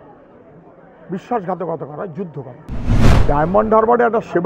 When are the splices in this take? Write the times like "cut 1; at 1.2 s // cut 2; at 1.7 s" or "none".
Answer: cut 1; at 3.0 s